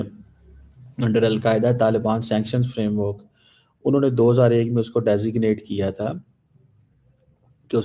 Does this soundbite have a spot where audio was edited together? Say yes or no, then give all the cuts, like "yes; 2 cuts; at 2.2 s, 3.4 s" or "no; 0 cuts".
no; 0 cuts